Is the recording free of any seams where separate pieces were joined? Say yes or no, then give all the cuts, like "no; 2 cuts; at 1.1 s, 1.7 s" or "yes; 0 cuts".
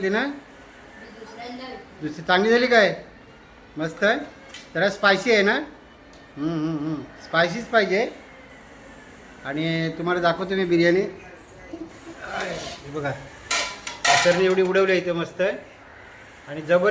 yes; 0 cuts